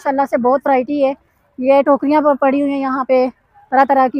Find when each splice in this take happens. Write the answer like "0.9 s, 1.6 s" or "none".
none

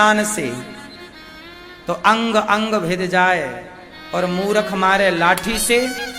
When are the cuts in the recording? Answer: none

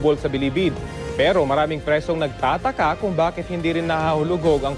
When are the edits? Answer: 2.3 s

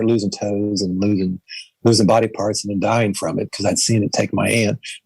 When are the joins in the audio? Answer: none

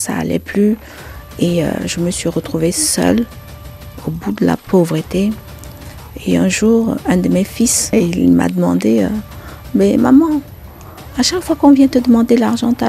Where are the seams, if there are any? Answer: 7.9 s

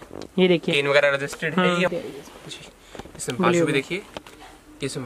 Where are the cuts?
1.9 s

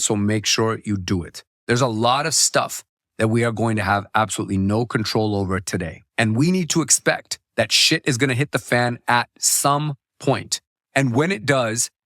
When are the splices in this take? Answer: 1.4 s

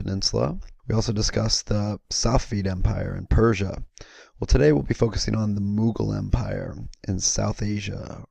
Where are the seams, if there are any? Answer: 1.4 s

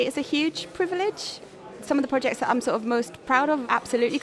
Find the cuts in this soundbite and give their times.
none

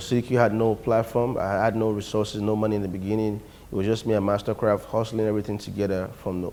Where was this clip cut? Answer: none

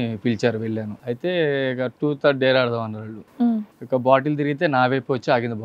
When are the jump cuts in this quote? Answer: 0.9 s, 3.5 s

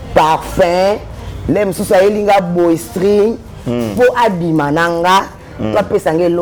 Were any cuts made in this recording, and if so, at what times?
none

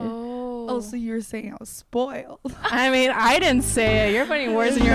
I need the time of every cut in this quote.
none

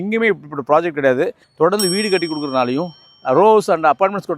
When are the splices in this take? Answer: 1.4 s

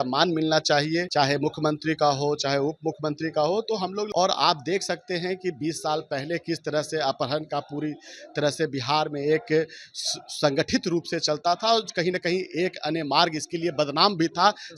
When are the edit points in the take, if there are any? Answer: 1.1 s, 4.1 s

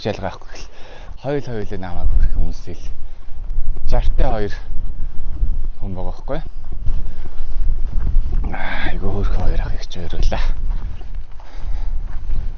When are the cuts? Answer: none

